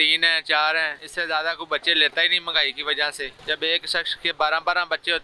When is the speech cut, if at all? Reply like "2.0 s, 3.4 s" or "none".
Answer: 1.0 s, 3.4 s